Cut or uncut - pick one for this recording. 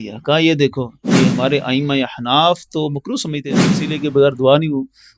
cut